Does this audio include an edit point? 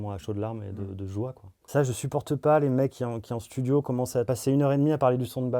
yes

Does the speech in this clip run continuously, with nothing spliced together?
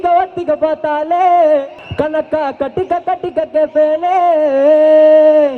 no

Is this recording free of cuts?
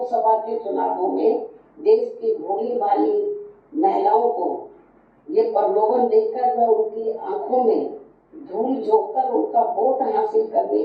yes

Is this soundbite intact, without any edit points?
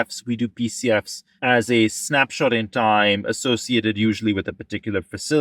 no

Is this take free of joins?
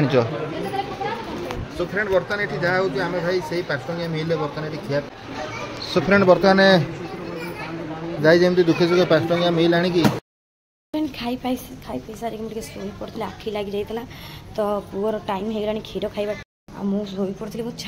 no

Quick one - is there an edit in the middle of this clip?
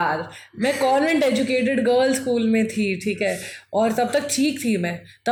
no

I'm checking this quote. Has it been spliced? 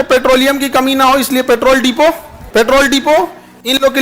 yes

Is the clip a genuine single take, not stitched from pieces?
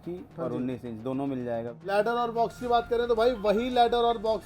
no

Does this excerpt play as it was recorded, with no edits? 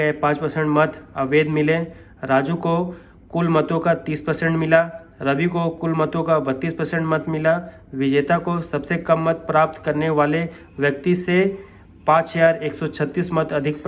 yes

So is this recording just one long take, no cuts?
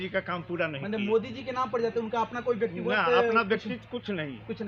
yes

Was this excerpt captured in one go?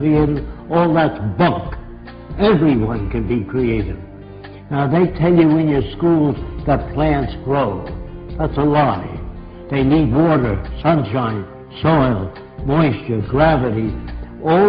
no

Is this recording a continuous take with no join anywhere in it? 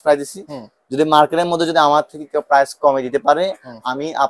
yes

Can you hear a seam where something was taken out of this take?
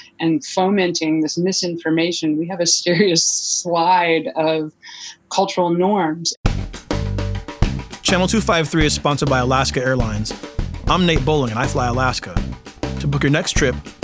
yes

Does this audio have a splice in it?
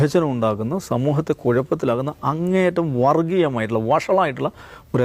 no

